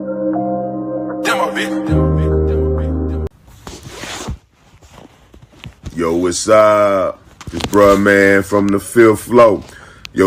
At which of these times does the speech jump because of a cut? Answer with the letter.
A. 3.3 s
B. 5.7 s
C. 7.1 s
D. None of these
A